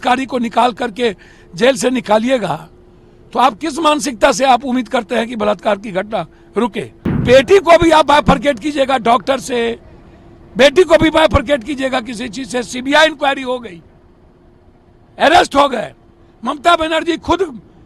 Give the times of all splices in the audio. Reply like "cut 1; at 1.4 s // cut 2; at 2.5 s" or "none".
cut 1; at 7.2 s